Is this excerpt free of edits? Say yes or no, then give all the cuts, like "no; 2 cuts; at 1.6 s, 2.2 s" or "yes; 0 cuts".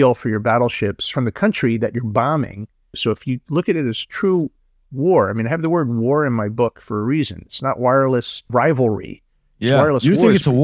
no; 3 cuts; at 1.0 s, 3.0 s, 8.5 s